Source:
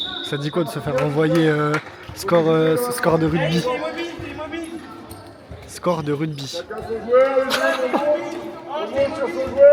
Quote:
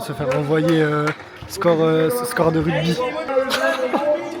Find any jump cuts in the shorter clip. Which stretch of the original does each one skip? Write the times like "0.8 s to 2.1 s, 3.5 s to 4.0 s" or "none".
4.0 s to 7.3 s